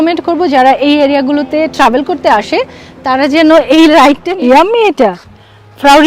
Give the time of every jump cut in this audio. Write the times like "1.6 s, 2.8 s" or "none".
4.3 s